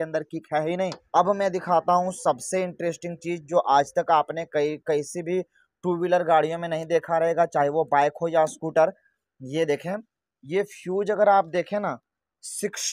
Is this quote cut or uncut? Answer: cut